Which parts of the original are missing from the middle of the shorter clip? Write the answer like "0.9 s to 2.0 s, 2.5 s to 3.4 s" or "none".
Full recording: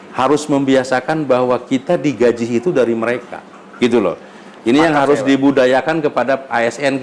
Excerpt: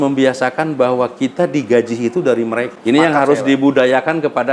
3.2 s to 4.5 s